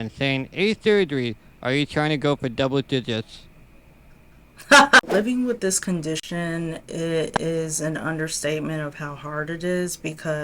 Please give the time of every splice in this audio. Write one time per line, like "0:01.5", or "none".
0:05.0